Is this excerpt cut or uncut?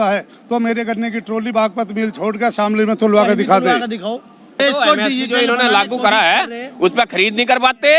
cut